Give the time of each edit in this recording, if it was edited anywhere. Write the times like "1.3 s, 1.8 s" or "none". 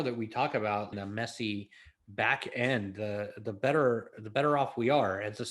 0.9 s